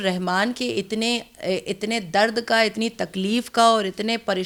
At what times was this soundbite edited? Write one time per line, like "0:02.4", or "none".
none